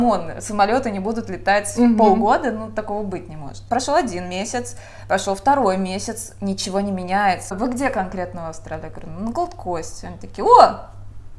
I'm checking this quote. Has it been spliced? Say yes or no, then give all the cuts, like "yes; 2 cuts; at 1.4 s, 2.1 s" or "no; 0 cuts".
yes; 2 cuts; at 3.7 s, 7.5 s